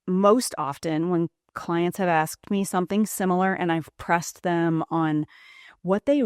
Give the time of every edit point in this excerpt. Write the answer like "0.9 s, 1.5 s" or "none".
none